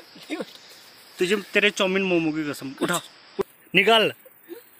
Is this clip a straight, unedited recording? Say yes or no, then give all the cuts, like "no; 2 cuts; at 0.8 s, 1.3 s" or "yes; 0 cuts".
no; 1 cut; at 3.4 s